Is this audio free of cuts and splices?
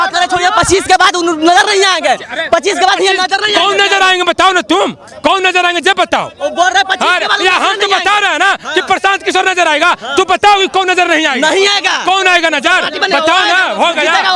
yes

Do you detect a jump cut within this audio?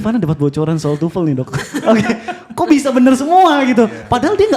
no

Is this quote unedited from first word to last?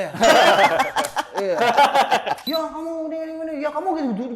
no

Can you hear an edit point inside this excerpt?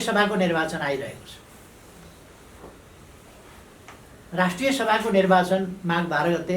no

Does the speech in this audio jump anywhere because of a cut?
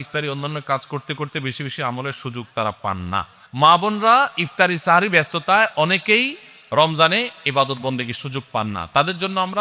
no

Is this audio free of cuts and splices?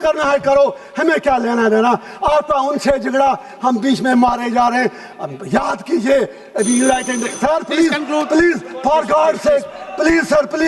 yes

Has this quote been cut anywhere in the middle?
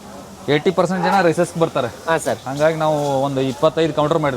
no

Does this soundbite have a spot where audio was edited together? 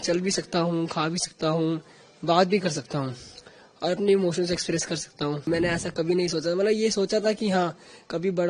yes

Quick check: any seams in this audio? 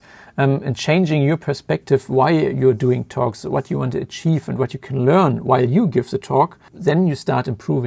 yes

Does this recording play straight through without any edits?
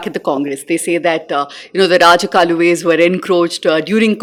yes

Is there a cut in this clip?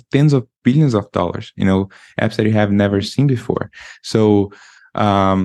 no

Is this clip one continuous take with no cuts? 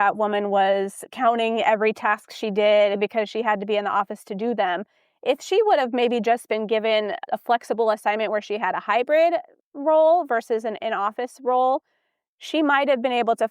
no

